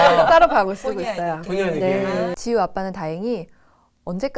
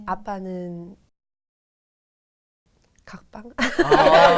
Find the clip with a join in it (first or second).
first